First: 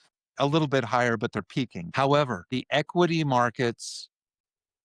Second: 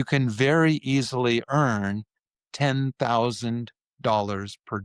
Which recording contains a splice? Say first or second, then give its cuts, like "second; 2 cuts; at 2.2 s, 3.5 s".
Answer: first; 2 cuts; at 1.8 s, 2.4 s